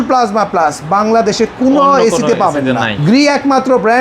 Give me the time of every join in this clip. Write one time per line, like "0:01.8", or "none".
0:02.9